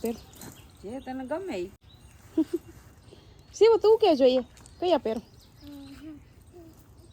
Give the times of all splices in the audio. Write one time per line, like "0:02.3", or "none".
0:01.9